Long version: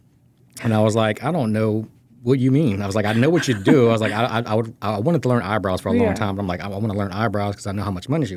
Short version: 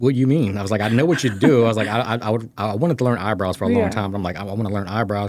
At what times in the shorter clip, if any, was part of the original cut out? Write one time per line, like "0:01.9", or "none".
none